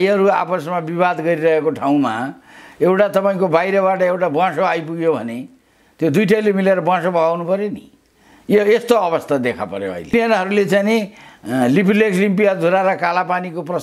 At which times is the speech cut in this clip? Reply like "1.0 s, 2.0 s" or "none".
10.1 s